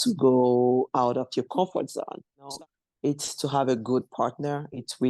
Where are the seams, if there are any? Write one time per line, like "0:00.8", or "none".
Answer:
0:02.5